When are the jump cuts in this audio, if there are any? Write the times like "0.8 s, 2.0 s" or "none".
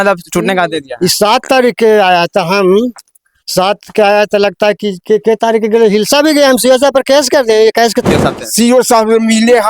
8.1 s